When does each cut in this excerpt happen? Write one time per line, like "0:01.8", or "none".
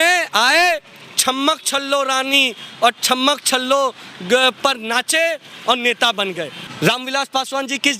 0:06.6